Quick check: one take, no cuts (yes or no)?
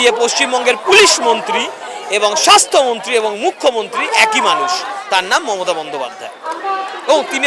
yes